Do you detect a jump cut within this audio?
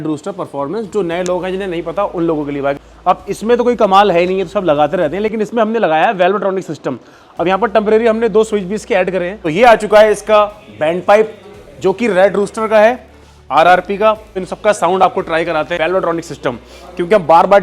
yes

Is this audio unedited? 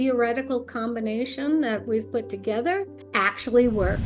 no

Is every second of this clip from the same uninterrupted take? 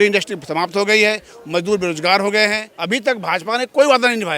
no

